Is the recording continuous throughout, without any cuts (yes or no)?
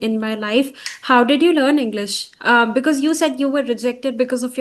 yes